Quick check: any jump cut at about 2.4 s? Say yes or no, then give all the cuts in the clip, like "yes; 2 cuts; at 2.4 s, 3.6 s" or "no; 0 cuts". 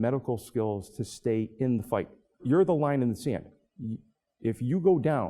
yes; 1 cut; at 2.4 s